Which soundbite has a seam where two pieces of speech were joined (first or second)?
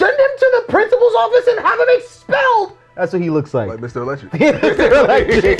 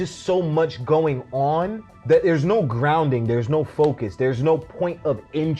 second